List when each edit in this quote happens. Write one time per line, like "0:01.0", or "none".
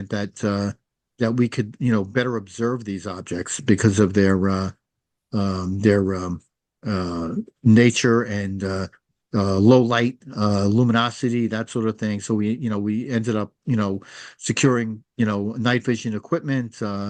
none